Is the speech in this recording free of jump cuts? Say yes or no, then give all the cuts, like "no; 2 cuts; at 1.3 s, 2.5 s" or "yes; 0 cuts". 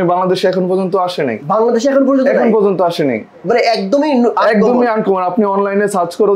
yes; 0 cuts